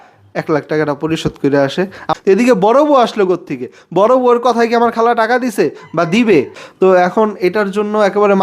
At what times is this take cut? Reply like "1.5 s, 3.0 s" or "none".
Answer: 2.1 s, 6.7 s